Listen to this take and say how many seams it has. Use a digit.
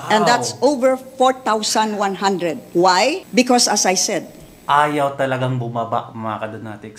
2